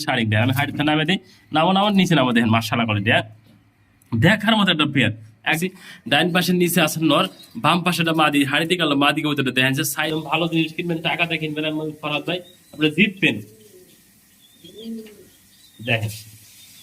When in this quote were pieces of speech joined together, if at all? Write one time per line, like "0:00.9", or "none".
0:05.6
0:10.0